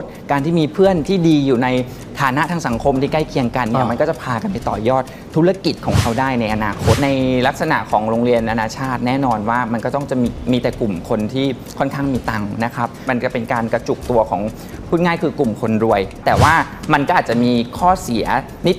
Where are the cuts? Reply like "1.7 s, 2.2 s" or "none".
7.0 s, 13.0 s, 16.2 s